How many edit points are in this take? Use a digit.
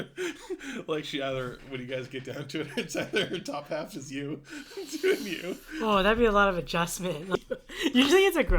1